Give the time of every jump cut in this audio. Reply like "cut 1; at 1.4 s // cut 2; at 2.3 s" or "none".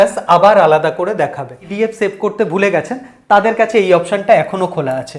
cut 1; at 1.6 s